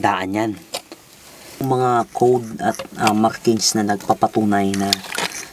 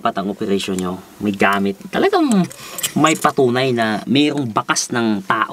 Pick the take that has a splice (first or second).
first